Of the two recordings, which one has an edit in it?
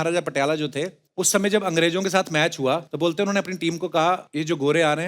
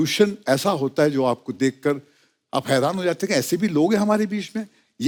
first; 3 cuts; at 1.0 s, 2.9 s, 4.3 s

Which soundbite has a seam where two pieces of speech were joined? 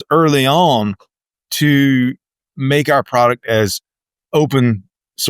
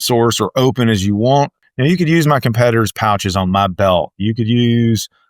second; 1 cut; at 1.6 s

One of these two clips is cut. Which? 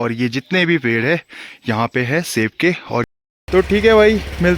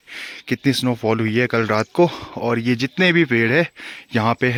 first; 1 cut; at 3.0 s

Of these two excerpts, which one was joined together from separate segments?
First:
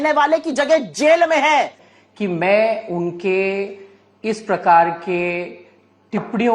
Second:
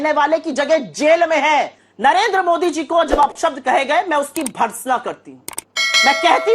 first; 1 cut; at 1.8 s

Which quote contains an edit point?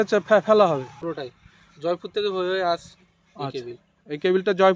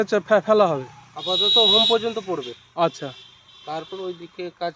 first; 1 cut; at 1.2 s

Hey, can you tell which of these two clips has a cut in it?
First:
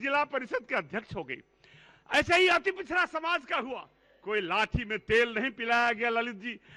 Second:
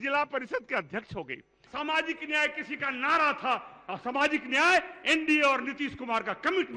second; 1 cut; at 1.6 s

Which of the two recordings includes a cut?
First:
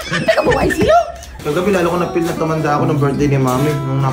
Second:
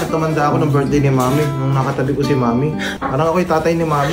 first; 1 cut; at 1.3 s

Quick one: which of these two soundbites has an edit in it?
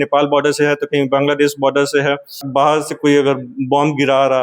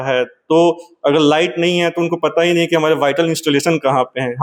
first; 1 cut; at 2.4 s

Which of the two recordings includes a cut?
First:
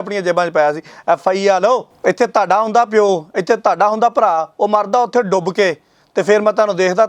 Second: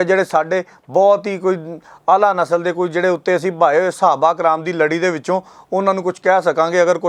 first; 1 cut; at 1.9 s

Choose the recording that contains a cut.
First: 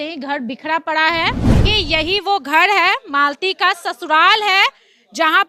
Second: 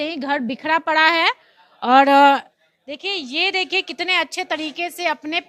first; 1 cut; at 1.6 s

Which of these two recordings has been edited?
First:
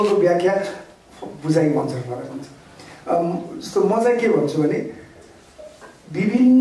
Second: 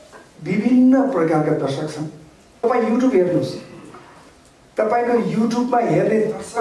second; 1 cut; at 2.5 s

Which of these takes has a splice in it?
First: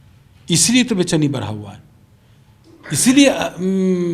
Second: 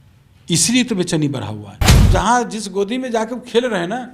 second; 1 cut; at 2.0 s

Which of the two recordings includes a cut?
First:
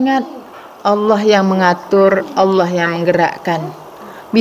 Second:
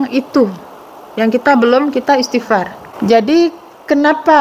second; 1 cut; at 2.8 s

